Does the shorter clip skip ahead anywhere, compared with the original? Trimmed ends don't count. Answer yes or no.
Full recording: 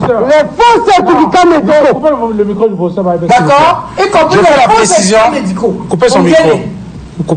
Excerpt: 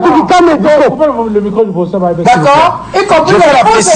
no